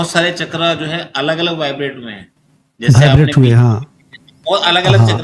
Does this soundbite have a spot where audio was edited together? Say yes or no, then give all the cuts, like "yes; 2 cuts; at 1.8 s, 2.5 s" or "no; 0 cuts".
no; 0 cuts